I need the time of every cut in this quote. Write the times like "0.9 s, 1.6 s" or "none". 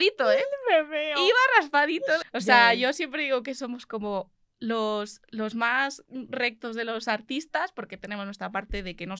2.2 s